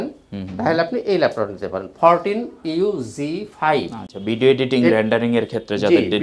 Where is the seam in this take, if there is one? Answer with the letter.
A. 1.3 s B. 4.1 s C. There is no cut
C